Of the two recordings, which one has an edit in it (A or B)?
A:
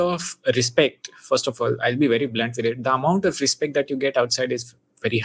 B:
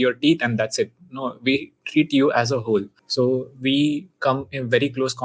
B